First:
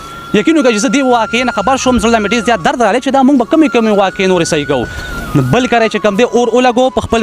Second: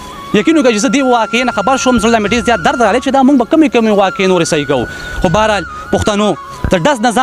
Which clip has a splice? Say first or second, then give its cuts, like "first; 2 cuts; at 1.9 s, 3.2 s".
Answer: first; 1 cut; at 5.0 s